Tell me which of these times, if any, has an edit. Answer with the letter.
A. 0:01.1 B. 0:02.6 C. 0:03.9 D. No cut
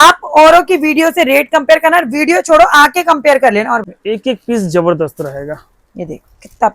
C